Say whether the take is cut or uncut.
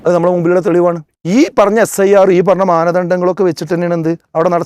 cut